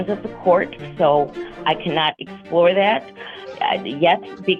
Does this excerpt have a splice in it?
no; 0 cuts

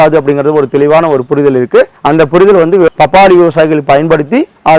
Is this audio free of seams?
no; 1 cut; at 2.9 s

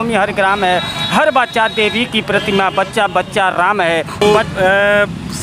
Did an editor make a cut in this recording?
yes; 1 cut; at 4.2 s

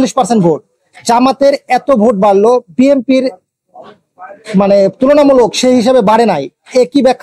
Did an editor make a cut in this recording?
no; 0 cuts

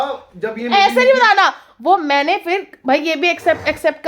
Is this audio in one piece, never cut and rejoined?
yes; 0 cuts

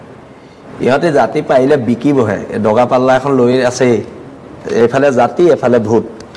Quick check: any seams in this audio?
no; 0 cuts

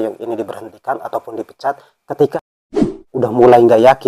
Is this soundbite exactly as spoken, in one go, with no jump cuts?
no; 1 cut; at 2.7 s

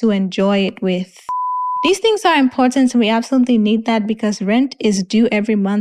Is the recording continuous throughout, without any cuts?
no; 1 cut; at 1.7 s

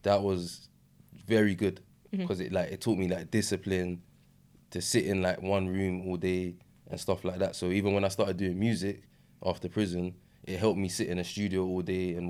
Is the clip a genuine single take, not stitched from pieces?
yes; 0 cuts

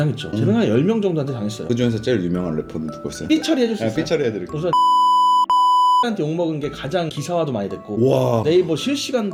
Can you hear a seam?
no; 0 cuts

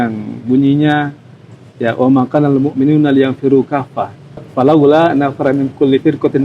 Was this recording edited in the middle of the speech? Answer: yes; 1 cut; at 4.5 s

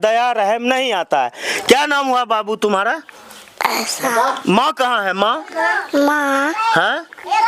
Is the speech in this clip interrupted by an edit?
no; 0 cuts

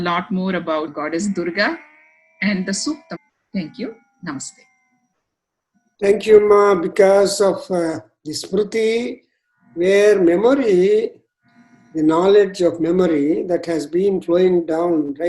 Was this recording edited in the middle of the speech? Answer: yes; 2 cuts; at 0.9 s, 3.2 s

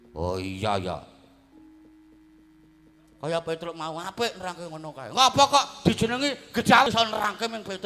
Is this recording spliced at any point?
yes; 1 cut; at 6.9 s

